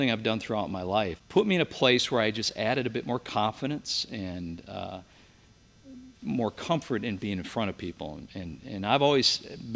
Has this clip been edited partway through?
yes; 1 cut; at 1.2 s

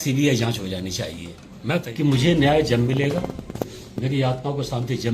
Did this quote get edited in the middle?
yes; 1 cut; at 1.8 s

